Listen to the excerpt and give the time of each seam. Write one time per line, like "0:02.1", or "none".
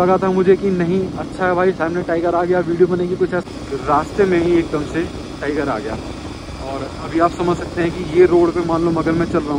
0:03.4